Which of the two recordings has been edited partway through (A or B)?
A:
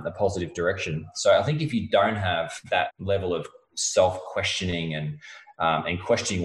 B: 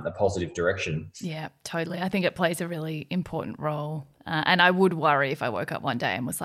A